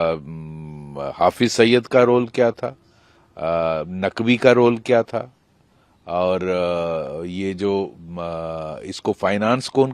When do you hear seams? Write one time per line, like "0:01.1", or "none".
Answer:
none